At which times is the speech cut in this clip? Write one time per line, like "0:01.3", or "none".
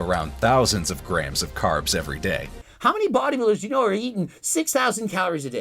0:02.5